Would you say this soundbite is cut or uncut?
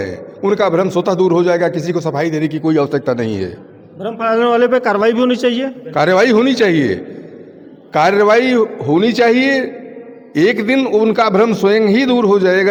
uncut